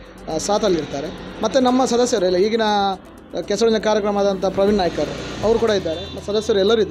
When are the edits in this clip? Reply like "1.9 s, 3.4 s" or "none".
none